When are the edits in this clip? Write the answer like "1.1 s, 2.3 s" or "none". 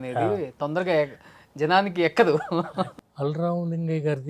2.9 s

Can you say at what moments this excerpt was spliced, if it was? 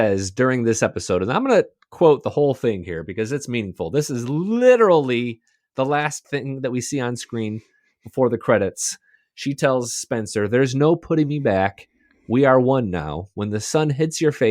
6.2 s

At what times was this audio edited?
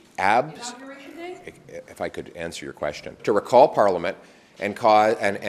3.1 s

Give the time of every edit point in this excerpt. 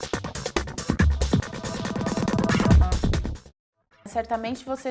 0.9 s

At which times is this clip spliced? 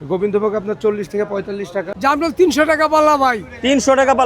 1.9 s

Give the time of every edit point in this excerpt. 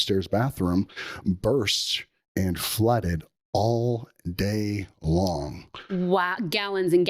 none

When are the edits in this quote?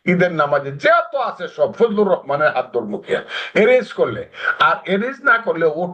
none

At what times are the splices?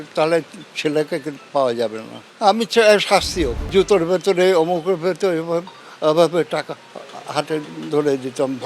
3.6 s

